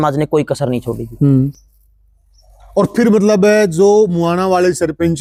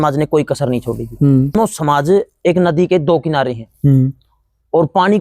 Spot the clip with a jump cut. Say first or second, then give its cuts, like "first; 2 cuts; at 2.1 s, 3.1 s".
second; 1 cut; at 1.6 s